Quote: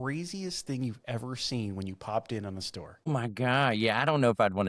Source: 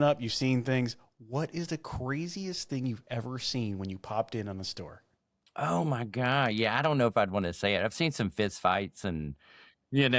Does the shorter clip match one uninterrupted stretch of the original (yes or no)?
no